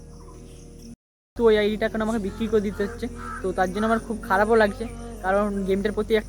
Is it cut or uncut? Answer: cut